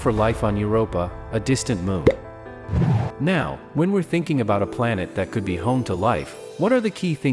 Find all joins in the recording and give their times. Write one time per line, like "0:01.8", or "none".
0:03.1